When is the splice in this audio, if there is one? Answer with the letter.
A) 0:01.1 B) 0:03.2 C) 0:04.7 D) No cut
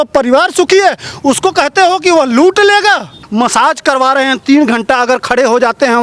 B